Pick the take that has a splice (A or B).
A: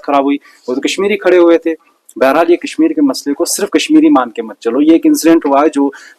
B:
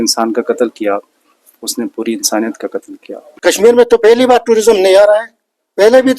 B